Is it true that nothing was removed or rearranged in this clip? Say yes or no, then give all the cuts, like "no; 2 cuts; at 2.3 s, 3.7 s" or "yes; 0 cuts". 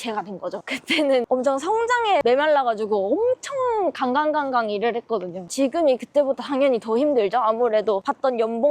no; 3 cuts; at 1.1 s, 2.2 s, 5.5 s